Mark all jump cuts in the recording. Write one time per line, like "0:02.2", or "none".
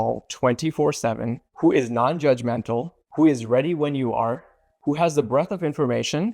0:03.0